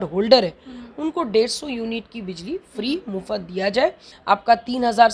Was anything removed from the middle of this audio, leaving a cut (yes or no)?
yes